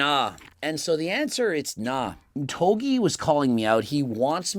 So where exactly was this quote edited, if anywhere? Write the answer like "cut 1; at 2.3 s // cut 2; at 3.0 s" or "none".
none